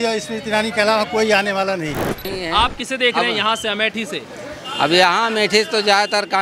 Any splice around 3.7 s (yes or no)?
no